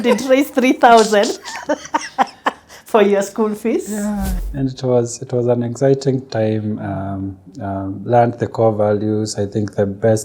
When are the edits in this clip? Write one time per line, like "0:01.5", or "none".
0:04.4